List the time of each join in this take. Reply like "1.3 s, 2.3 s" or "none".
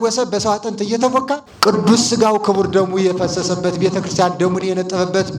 1.5 s